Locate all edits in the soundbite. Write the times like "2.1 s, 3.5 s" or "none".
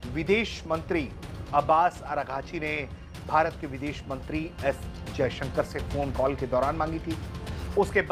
none